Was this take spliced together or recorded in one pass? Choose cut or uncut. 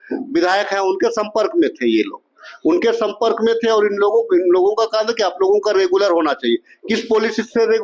uncut